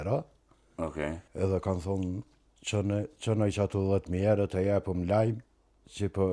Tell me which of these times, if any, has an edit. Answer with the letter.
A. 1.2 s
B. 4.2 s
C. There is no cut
A